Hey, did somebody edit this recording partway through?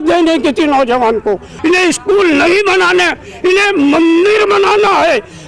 yes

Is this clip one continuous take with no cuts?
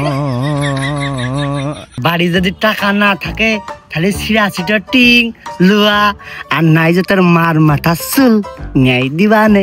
no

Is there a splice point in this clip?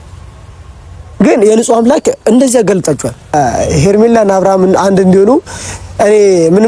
yes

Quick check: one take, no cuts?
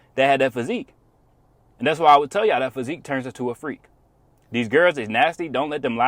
yes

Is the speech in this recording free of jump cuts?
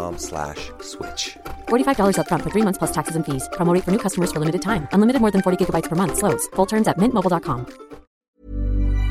no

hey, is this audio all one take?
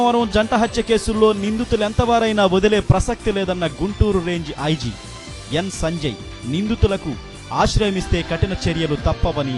yes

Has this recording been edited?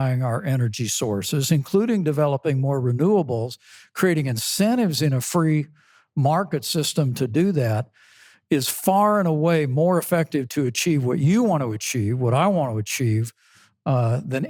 no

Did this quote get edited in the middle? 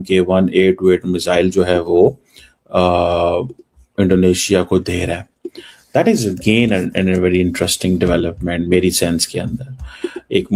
no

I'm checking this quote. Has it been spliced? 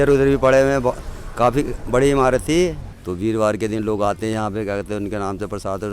yes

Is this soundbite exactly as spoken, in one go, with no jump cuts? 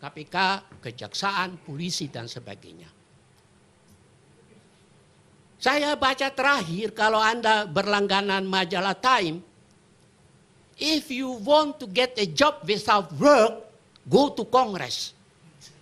yes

